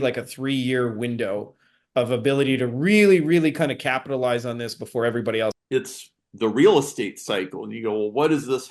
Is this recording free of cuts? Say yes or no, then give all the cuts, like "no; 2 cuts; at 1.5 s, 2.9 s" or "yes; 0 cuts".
no; 1 cut; at 5.5 s